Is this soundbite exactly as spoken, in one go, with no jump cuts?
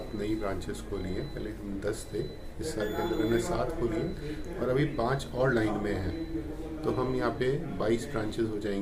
yes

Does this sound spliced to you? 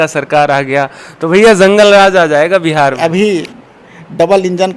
yes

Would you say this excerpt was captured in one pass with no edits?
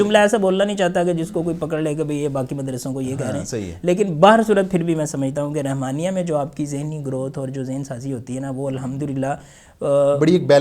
yes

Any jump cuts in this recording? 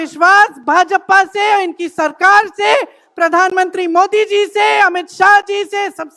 no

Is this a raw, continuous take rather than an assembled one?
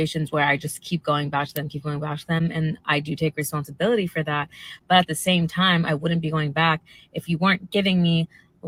yes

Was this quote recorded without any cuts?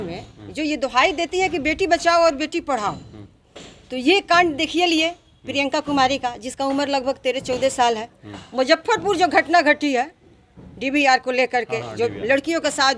yes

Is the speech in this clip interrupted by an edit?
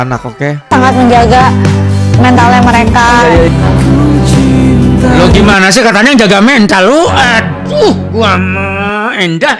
no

